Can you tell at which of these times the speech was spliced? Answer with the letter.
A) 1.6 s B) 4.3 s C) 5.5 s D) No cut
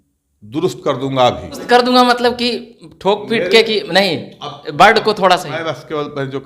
A